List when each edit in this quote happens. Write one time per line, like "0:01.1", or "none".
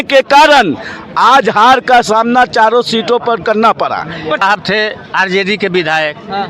0:04.4